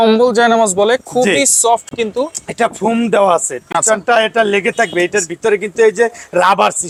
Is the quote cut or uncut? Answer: uncut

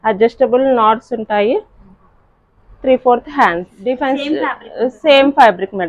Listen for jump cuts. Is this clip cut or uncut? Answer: cut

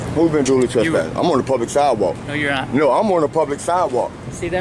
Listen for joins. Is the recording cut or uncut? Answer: uncut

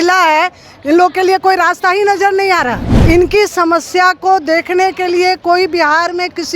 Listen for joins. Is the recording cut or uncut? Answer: cut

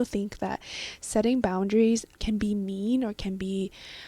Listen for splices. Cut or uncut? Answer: cut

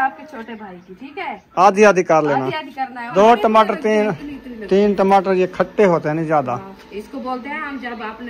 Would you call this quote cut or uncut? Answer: cut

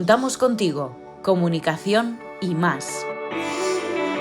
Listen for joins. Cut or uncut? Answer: cut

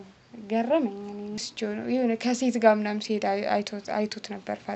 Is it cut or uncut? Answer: cut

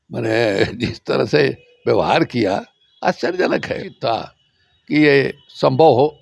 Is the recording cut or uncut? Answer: cut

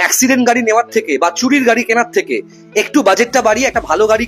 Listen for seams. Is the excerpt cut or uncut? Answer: uncut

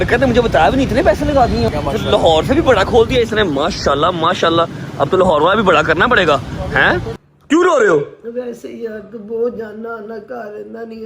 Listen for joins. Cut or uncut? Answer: cut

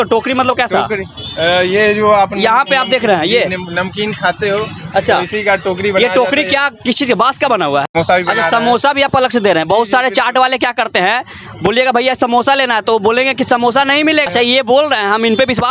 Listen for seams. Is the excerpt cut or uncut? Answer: cut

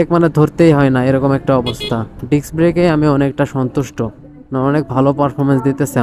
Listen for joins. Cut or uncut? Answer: uncut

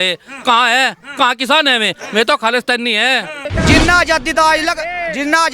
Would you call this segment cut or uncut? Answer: cut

